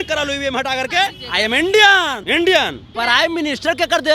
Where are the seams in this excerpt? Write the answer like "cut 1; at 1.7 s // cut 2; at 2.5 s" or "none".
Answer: cut 1; at 1.2 s // cut 2; at 2.2 s // cut 3; at 2.8 s